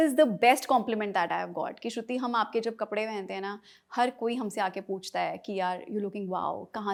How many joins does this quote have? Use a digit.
0